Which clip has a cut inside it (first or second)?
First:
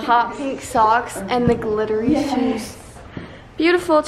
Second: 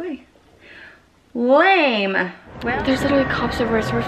second